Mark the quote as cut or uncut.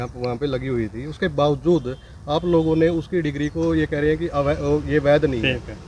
uncut